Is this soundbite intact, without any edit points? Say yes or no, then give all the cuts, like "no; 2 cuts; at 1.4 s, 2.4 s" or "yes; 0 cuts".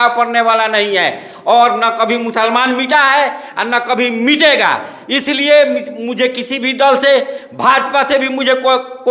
yes; 0 cuts